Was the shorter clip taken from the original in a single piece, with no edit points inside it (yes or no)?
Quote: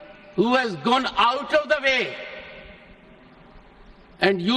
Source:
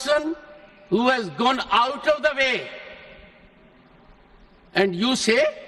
yes